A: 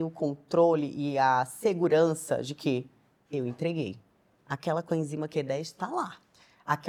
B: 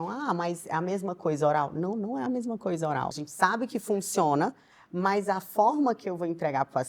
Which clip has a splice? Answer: B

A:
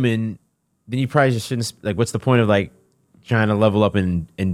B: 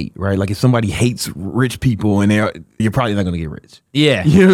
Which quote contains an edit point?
B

